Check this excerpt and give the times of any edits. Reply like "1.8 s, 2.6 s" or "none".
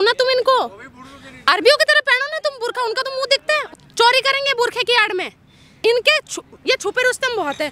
3.7 s, 5.8 s